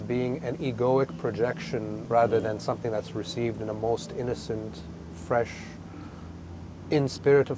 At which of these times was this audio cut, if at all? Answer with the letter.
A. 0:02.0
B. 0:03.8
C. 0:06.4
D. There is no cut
A